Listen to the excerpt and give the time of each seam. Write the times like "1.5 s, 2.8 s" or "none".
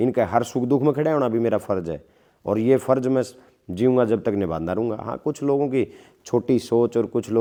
none

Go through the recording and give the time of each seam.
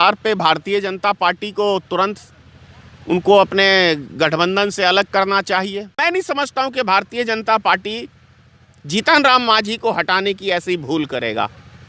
6.0 s

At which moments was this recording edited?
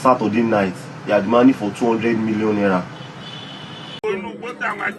3.8 s

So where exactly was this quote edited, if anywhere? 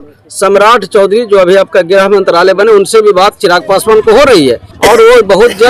4.7 s

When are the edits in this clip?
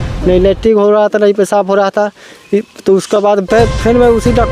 none

